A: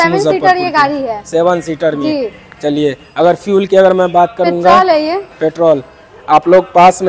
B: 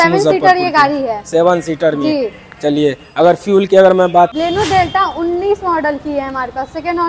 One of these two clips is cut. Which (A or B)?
B